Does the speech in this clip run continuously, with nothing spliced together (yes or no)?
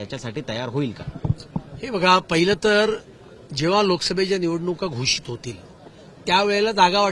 yes